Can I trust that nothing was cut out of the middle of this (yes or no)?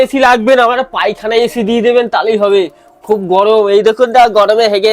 yes